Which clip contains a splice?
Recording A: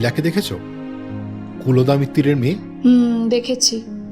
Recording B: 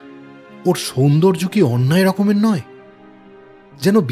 A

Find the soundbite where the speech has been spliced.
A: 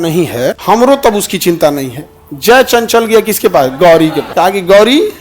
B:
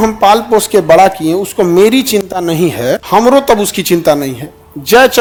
A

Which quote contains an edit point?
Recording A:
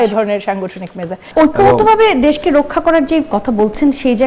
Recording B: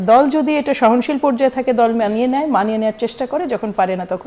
A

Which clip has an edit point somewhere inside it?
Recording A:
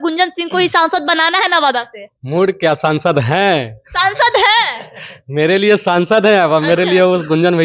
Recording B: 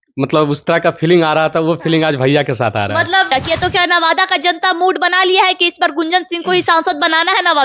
B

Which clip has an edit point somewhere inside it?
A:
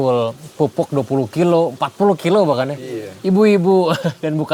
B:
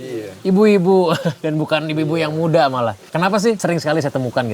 B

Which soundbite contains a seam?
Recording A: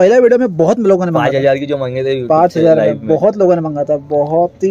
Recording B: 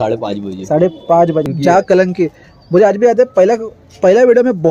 B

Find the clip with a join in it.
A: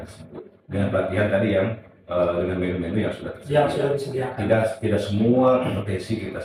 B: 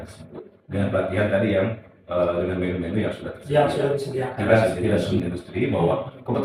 B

